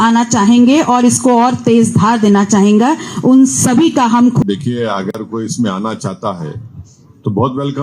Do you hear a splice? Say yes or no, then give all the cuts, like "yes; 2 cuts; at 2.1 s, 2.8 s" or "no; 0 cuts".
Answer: yes; 1 cut; at 4.4 s